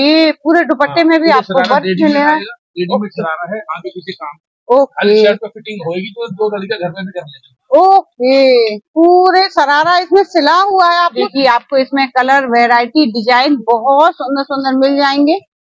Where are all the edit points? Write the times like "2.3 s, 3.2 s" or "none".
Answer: 11.2 s